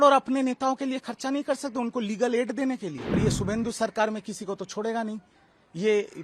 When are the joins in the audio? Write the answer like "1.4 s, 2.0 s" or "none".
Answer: 3.2 s